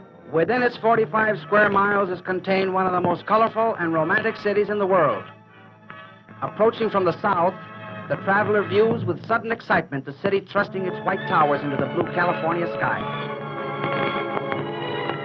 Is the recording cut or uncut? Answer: cut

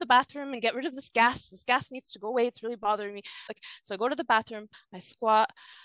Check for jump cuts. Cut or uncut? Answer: cut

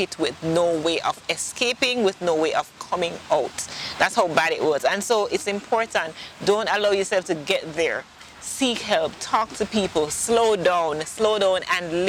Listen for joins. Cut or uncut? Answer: uncut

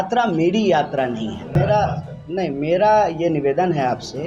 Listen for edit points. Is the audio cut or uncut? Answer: cut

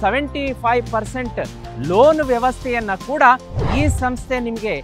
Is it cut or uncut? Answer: uncut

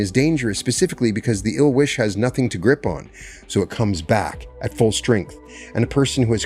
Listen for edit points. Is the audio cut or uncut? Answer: uncut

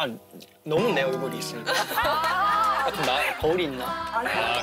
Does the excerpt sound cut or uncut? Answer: uncut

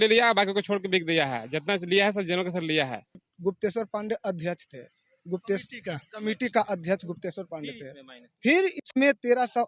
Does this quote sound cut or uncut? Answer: cut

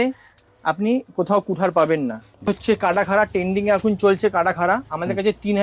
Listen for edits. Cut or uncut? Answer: cut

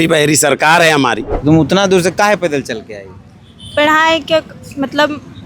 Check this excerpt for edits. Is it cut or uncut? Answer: cut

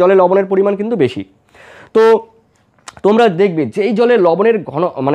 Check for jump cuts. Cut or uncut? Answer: uncut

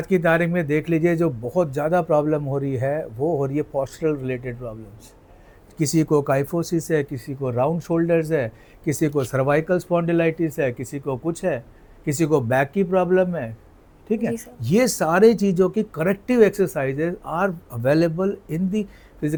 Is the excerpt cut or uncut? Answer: uncut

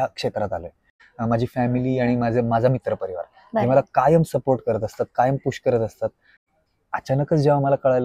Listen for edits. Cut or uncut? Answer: cut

